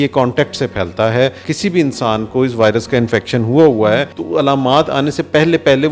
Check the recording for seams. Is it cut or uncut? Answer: cut